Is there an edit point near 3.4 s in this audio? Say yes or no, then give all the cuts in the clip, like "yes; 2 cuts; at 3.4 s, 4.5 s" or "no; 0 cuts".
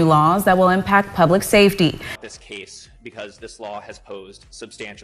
no; 1 cut; at 2.1 s